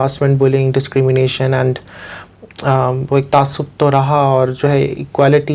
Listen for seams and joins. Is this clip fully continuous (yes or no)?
yes